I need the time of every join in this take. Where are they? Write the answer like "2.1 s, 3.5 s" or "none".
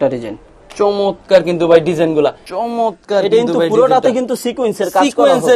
2.5 s

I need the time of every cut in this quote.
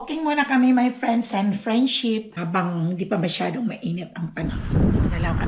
2.3 s, 4.6 s

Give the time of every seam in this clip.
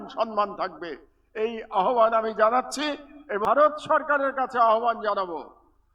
3.4 s

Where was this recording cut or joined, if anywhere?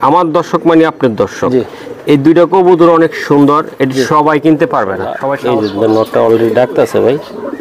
5.3 s

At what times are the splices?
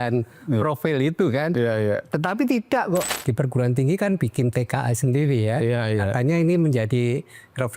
3.1 s

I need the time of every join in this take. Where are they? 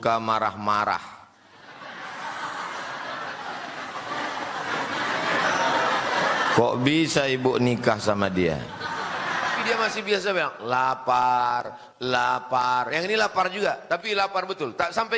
9.6 s

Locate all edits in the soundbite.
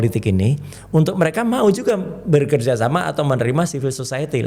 none

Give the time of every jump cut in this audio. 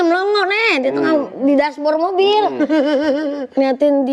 none

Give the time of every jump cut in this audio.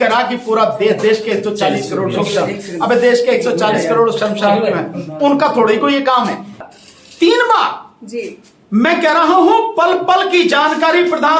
6.6 s

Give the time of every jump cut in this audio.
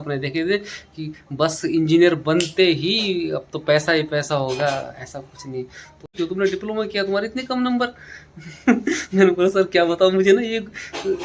6.1 s

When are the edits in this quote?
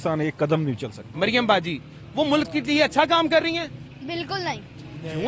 1.1 s

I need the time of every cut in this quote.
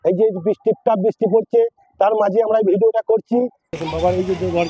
3.6 s

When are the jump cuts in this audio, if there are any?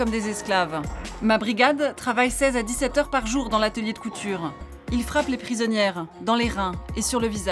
1.0 s, 4.7 s

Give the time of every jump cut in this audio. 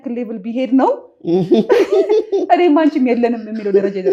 none

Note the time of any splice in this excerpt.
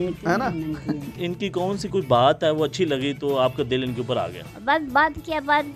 1.1 s, 4.4 s

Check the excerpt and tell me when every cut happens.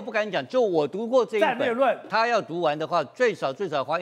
2.0 s

